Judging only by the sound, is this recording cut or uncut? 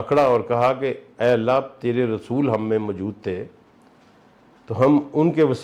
uncut